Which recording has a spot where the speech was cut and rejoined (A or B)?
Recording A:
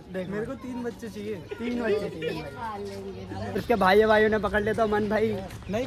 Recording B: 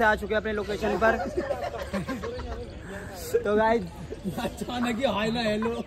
A